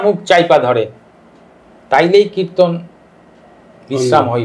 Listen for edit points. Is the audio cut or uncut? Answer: uncut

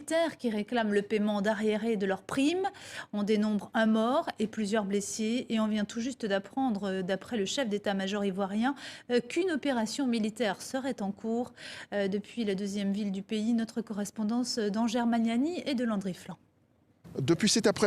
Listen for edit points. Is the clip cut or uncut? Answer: cut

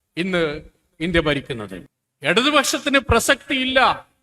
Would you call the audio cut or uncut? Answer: cut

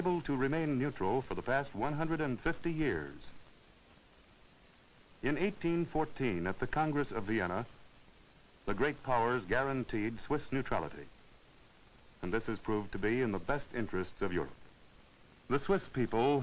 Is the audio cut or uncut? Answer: cut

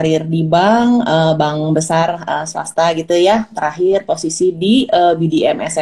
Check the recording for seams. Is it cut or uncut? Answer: uncut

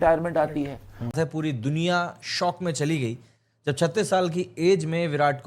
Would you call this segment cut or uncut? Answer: cut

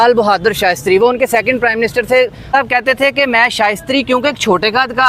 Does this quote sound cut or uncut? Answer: cut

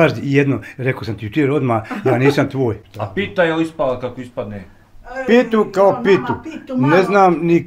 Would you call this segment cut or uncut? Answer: cut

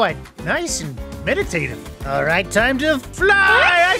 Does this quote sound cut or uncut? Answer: uncut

